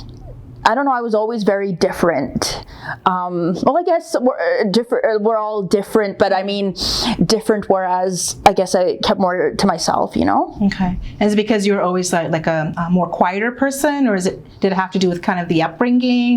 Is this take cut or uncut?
uncut